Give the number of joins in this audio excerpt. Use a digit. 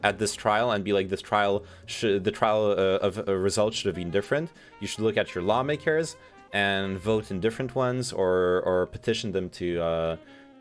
0